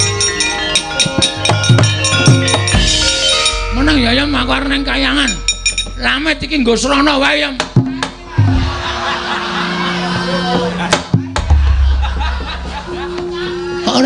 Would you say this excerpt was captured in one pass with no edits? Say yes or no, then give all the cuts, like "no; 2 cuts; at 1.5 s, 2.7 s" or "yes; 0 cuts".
yes; 0 cuts